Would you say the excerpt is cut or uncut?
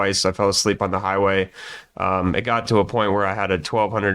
uncut